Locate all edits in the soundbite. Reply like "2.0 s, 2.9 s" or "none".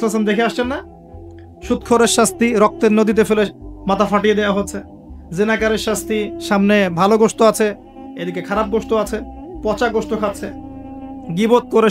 none

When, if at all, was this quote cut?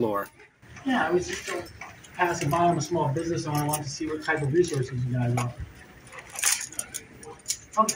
none

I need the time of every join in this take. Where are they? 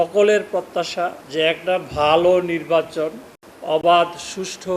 none

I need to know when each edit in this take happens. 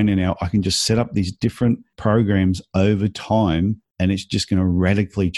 1.9 s, 3.9 s

